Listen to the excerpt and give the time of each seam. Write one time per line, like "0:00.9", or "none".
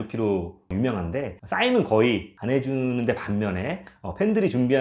none